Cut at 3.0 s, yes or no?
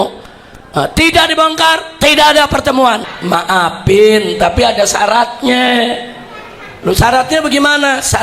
yes